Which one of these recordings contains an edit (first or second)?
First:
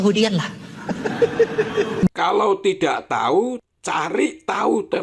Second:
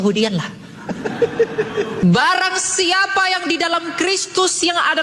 second